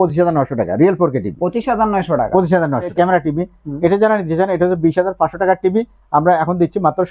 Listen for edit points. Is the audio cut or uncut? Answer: cut